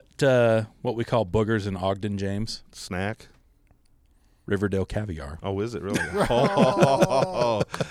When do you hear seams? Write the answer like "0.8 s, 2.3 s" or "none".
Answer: none